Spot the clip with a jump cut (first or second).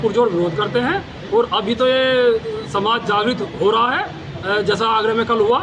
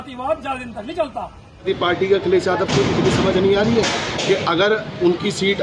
second